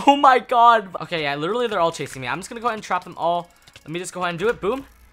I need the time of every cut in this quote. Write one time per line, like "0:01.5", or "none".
0:01.0